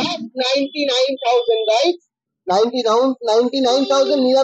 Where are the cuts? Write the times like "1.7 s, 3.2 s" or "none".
none